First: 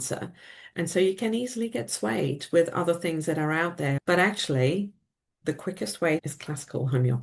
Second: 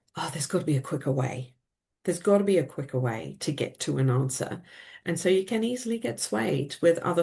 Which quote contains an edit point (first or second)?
first